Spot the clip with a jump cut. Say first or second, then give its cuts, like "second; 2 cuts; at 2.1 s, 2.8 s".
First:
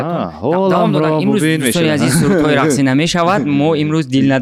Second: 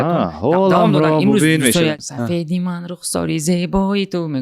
second; 1 cut; at 1.9 s